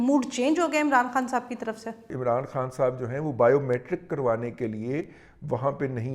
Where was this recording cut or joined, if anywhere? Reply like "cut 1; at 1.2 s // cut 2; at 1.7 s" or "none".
cut 1; at 2.1 s